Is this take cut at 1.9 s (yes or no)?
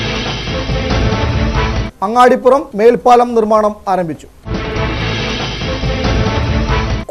yes